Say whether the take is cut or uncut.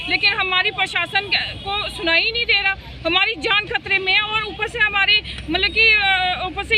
uncut